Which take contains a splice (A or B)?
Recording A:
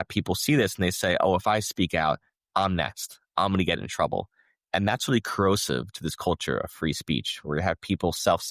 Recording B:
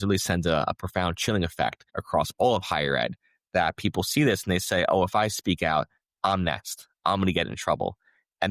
B